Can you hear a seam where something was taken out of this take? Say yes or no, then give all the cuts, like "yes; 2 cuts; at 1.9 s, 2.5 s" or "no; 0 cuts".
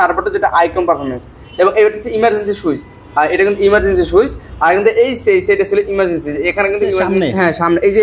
yes; 1 cut; at 7.1 s